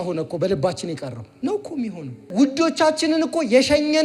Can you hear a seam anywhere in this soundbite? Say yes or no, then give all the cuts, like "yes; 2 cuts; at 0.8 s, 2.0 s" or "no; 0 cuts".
yes; 2 cuts; at 1.2 s, 2.3 s